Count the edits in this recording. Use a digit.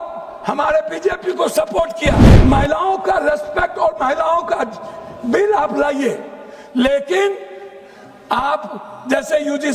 1